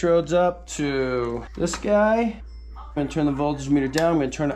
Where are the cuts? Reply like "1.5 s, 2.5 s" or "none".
1.5 s, 3.0 s